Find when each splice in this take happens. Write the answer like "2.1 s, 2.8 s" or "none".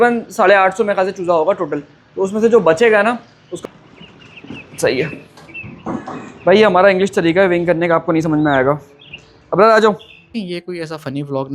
3.4 s, 10.3 s